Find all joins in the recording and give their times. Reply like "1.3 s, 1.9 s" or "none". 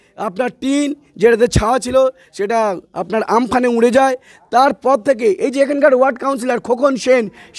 none